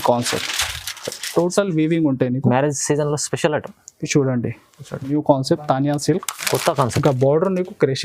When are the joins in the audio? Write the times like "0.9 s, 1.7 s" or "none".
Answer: 5.1 s